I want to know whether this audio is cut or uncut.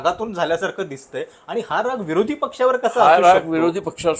uncut